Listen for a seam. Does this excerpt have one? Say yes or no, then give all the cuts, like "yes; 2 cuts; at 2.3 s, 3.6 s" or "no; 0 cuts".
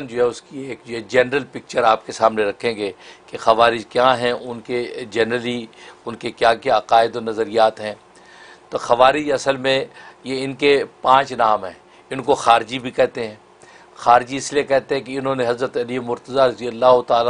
no; 0 cuts